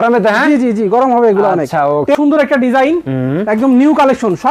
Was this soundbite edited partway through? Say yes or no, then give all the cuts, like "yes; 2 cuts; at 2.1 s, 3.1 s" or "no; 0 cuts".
yes; 1 cut; at 2.2 s